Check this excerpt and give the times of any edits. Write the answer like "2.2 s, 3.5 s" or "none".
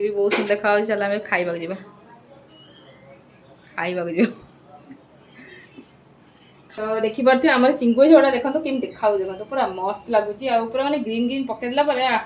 6.8 s